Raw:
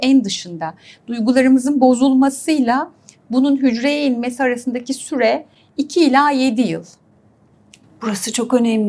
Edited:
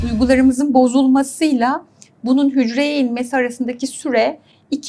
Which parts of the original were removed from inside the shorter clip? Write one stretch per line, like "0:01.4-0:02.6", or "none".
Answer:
none